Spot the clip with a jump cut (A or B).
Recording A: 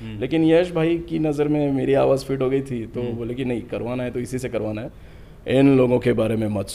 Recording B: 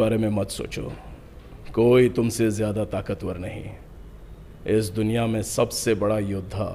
A